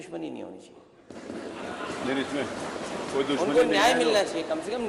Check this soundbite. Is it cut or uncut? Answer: uncut